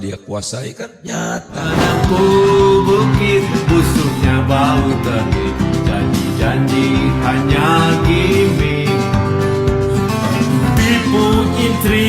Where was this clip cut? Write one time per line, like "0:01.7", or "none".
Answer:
0:01.7